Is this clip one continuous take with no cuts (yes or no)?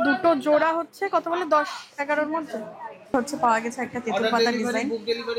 no